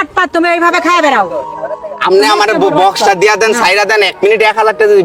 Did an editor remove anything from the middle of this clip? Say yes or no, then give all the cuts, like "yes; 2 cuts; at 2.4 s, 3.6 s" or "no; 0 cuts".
no; 0 cuts